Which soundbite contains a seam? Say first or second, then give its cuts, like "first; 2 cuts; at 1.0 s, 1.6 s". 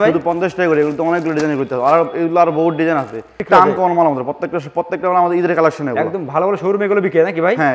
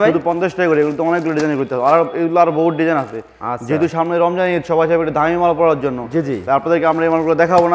first; 1 cut; at 3.4 s